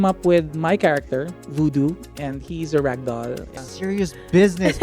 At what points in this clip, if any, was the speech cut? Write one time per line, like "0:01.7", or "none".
0:01.4
0:03.6